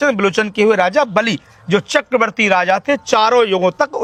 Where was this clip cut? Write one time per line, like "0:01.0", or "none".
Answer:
none